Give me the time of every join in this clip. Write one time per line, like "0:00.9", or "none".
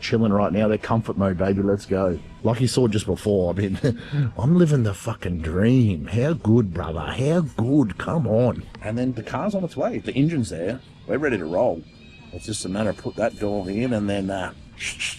0:02.3

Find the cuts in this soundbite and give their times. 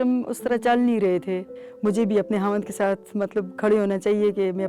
0:01.6

